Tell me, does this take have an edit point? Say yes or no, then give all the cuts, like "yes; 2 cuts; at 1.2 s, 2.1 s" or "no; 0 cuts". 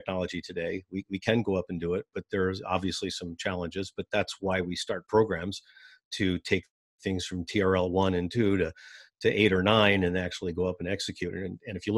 no; 0 cuts